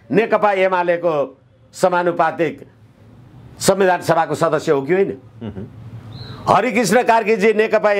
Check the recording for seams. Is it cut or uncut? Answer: uncut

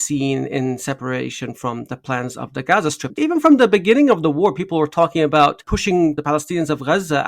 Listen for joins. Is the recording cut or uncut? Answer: cut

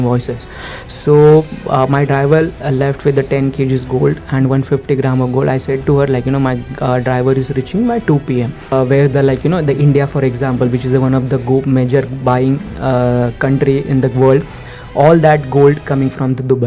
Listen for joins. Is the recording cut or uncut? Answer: cut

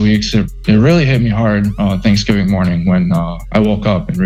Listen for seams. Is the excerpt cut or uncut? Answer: uncut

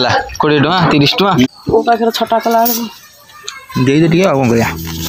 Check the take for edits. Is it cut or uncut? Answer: cut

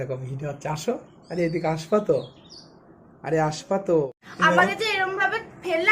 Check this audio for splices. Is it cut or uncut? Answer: cut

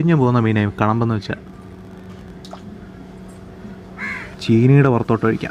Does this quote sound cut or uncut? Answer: uncut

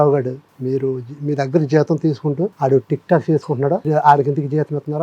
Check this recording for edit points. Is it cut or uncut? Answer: cut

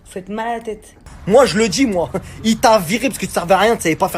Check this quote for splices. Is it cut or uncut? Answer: cut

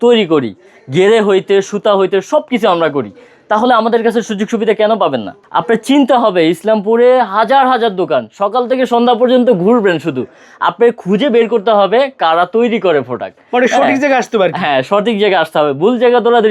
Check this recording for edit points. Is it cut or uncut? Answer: cut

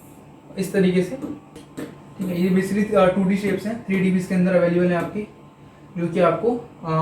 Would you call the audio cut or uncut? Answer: cut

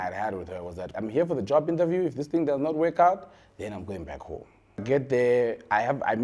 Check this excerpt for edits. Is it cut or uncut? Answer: cut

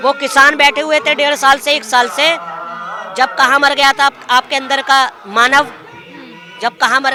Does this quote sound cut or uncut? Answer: uncut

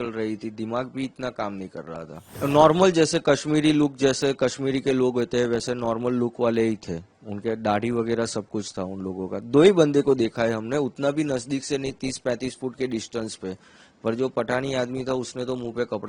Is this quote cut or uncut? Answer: cut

